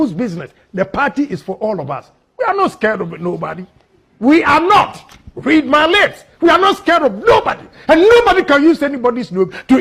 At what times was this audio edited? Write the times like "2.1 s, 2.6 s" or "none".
none